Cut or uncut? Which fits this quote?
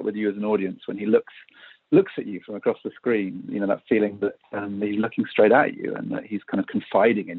uncut